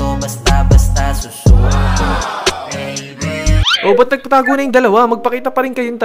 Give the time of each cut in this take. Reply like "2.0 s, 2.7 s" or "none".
none